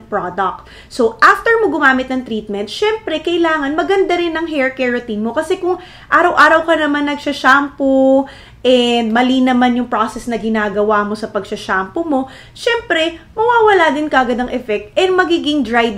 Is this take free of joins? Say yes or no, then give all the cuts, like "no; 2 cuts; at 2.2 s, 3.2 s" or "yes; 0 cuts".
yes; 0 cuts